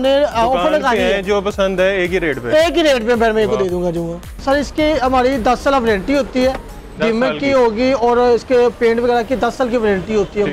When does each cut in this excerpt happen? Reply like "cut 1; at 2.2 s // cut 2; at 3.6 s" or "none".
cut 1; at 4.3 s